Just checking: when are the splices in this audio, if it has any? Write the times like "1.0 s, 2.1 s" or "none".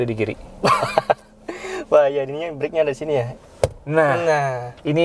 3.3 s

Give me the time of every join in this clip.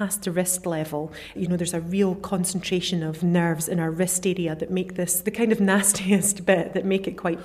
1.4 s, 3.2 s, 5.2 s

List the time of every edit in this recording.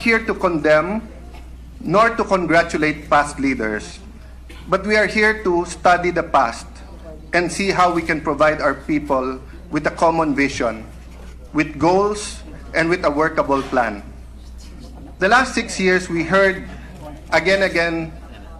16.3 s

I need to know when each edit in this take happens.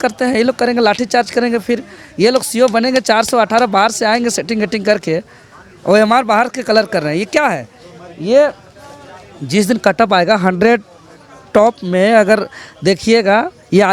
none

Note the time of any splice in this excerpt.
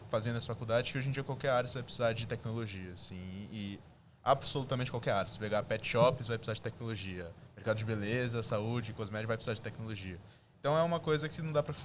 none

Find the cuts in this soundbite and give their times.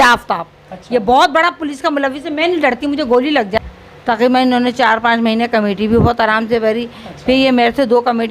3.6 s

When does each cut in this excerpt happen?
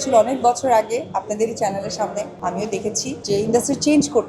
2.6 s

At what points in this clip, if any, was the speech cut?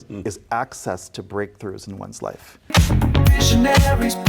2.5 s

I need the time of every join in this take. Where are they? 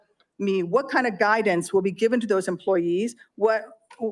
none

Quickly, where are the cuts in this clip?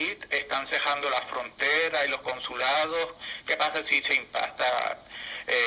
3.2 s

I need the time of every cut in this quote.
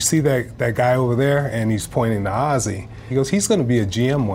3.1 s

